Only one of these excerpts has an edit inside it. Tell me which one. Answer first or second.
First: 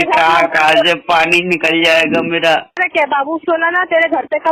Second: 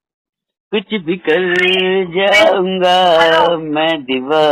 first